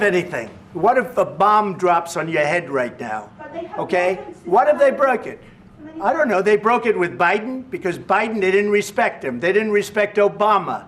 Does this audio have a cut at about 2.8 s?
yes; 1 cut; at 2.8 s

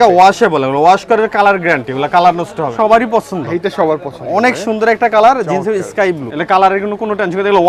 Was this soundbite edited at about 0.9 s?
no; 2 cuts; at 2.7 s, 6.3 s

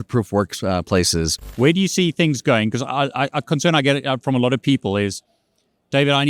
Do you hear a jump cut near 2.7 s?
no; 1 cut; at 1.5 s

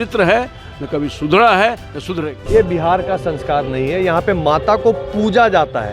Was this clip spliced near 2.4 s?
yes; 1 cut; at 2.4 s

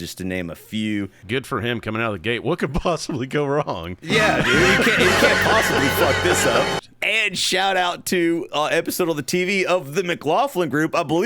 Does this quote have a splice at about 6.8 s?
yes; 2 cuts; at 1.2 s, 6.8 s

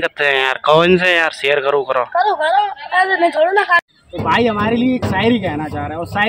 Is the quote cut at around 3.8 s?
yes; 1 cut; at 3.8 s

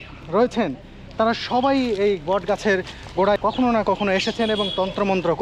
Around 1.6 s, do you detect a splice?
no; 1 cut; at 3.4 s

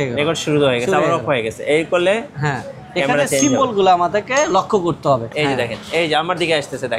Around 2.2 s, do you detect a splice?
no; 1 cut; at 5.3 s

